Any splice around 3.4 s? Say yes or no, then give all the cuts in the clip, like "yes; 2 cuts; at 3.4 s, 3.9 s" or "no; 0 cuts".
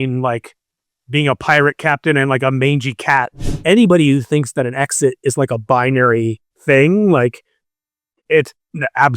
yes; 1 cut; at 3.4 s